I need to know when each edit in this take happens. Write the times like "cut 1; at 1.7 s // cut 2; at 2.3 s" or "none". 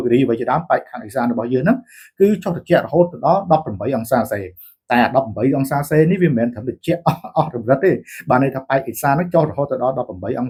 none